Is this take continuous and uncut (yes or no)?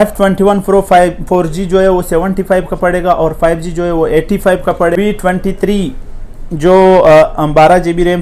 no